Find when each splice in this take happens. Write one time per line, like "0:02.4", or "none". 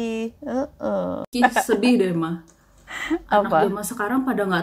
0:01.3